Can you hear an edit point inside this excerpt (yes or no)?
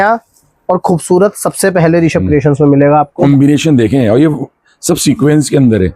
yes